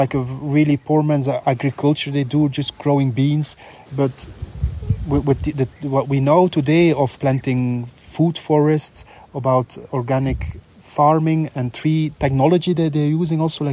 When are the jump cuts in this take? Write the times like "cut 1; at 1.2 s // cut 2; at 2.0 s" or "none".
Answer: cut 1; at 1.4 s // cut 2; at 3.7 s